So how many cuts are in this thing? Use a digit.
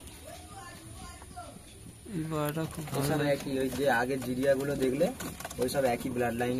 0